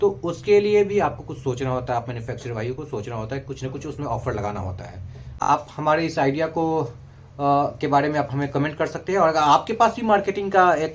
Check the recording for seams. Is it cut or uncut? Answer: cut